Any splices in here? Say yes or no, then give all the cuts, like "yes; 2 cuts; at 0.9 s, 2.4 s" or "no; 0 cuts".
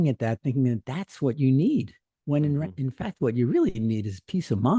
no; 0 cuts